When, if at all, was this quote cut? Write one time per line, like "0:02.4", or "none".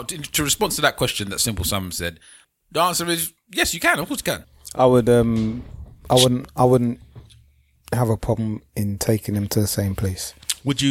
0:02.4
0:04.4